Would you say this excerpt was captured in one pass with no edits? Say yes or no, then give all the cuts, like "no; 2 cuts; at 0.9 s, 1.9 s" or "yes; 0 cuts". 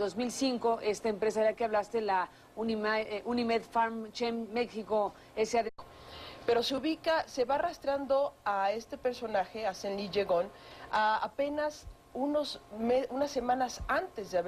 yes; 0 cuts